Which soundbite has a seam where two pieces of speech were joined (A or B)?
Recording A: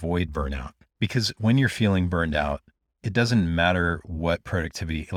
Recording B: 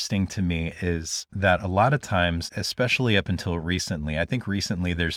B